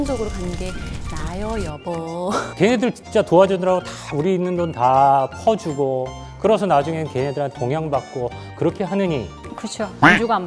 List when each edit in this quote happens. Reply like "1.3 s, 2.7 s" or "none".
2.5 s